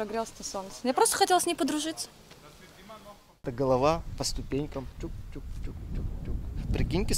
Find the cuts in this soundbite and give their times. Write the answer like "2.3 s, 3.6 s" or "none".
3.5 s